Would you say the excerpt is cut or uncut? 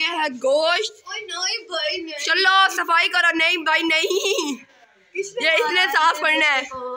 uncut